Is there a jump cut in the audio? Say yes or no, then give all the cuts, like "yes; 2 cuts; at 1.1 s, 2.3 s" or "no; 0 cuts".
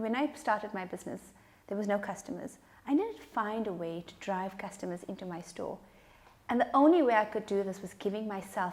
no; 0 cuts